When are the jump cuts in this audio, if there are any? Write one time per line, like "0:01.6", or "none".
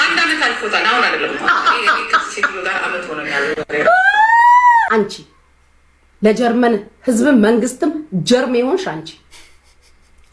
0:04.9

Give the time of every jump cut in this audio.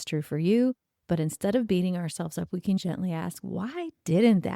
0:02.8

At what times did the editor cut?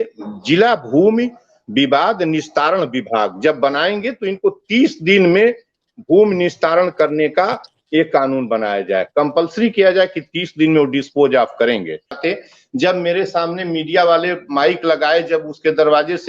0:12.2

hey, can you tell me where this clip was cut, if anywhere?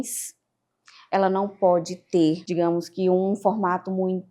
0:02.4

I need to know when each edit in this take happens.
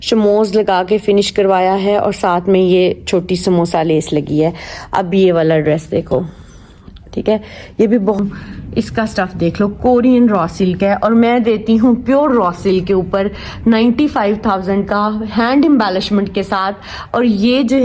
0:08.2

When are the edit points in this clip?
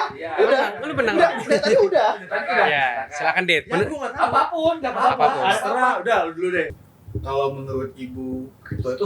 0:06.7

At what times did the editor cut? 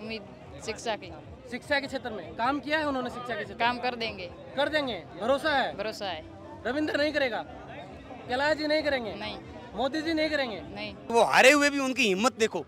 0:11.1

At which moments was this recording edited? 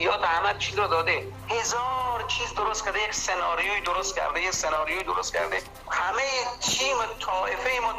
0:01.3
0:05.8

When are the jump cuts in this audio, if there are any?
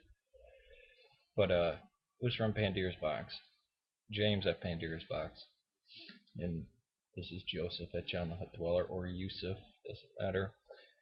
0:09.3

